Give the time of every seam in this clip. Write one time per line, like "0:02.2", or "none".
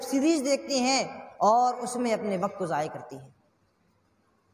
none